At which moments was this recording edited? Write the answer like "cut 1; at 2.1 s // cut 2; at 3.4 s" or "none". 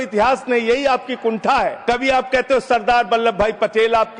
cut 1; at 1.8 s